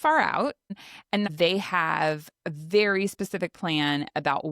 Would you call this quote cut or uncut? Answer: cut